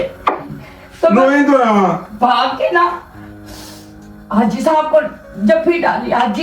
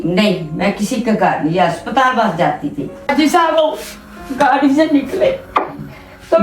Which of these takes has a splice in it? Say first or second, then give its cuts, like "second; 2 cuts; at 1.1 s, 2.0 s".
second; 1 cut; at 3.1 s